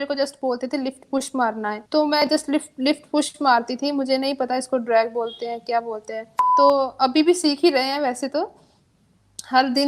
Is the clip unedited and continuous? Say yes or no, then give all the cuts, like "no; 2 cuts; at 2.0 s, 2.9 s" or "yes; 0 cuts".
no; 2 cuts; at 1.8 s, 6.4 s